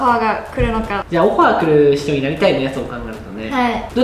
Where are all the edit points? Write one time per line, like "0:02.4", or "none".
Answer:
0:01.0